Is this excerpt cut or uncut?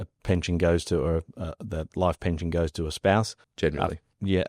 cut